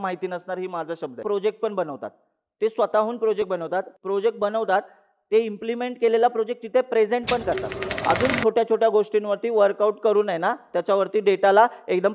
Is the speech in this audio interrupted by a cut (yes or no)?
yes